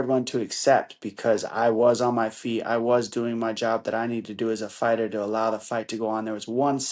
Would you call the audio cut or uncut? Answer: uncut